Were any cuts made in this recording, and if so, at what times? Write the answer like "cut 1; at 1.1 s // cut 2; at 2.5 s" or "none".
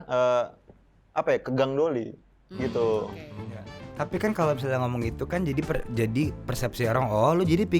none